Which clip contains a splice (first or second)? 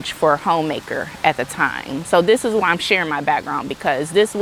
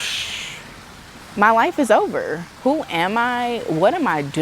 second